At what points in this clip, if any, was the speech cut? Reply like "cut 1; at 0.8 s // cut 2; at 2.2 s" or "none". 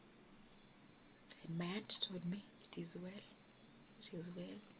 none